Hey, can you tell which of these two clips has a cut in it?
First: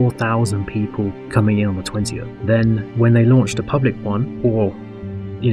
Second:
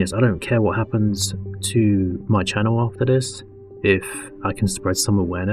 first; 2 cuts; at 1.2 s, 2.7 s

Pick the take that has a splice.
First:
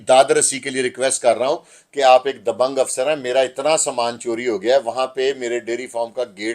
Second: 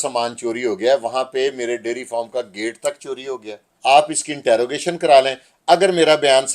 second; 1 cut; at 3.6 s

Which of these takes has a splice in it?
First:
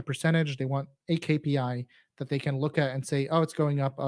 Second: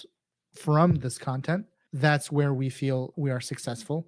second; 2 cuts; at 1.8 s, 3.1 s

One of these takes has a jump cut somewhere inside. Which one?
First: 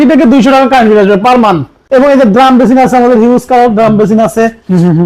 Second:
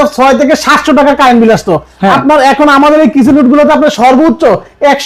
first; 1 cut; at 1.8 s

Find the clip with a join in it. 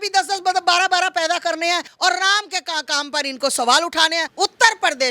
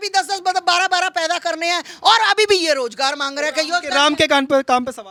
first; 2 cuts; at 1.9 s, 4.3 s

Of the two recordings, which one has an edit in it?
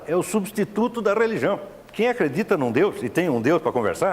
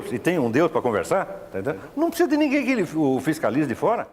first; 1 cut; at 1.8 s

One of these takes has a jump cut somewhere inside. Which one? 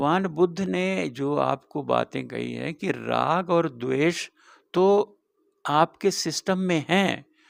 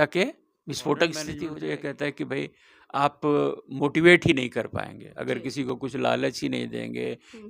second; 1 cut; at 1.5 s

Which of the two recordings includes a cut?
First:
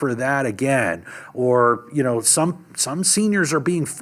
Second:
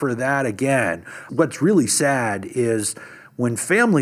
second; 1 cut; at 1.1 s

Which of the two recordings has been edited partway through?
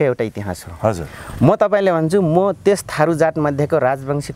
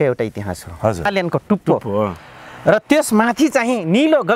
second; 1 cut; at 1.1 s

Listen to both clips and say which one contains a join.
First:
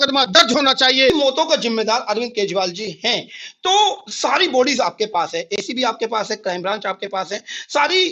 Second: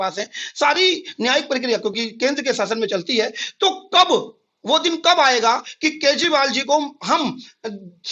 first; 1 cut; at 1.1 s

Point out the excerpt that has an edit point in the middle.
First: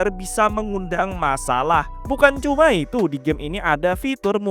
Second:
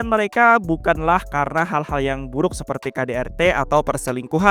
first; 1 cut; at 2.0 s

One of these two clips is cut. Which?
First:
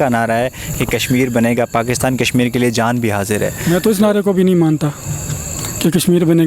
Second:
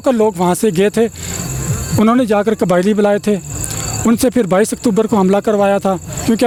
first; 1 cut; at 3.6 s

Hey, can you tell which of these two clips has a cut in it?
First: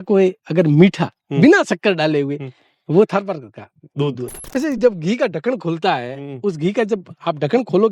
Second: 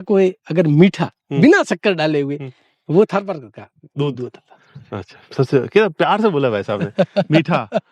first; 1 cut; at 4.5 s

